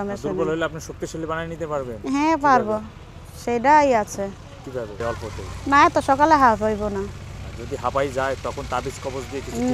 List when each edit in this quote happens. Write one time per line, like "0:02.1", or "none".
0:05.0